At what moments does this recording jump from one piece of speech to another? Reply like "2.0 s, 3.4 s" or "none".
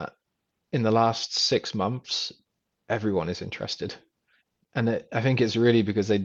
none